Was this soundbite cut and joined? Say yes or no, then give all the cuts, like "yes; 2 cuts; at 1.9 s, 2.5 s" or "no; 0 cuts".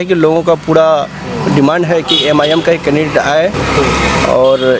no; 0 cuts